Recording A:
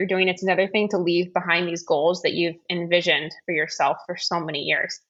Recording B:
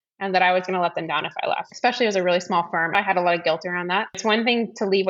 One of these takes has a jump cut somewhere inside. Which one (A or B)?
B